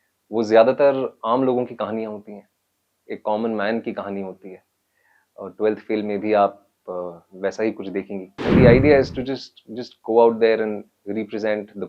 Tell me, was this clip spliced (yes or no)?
yes